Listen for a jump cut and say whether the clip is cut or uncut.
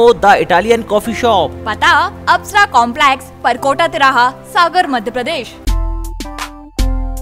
cut